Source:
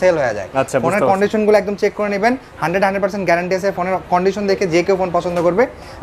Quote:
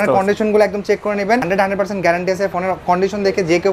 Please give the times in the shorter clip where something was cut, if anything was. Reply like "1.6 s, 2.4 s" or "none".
1.4 s